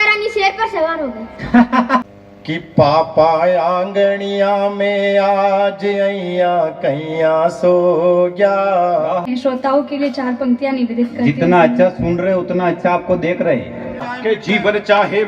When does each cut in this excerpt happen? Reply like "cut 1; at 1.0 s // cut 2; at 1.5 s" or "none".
cut 1; at 2.1 s // cut 2; at 9.2 s // cut 3; at 14.1 s